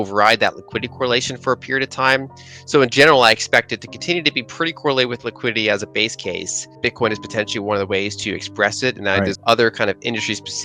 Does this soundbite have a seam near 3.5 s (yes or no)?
no